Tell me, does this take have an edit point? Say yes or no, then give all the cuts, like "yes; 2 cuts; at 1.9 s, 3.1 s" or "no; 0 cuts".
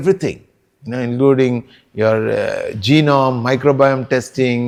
no; 0 cuts